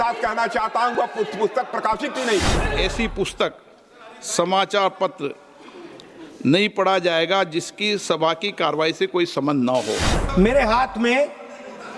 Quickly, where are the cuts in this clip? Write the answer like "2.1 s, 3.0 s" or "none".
2.8 s, 10.1 s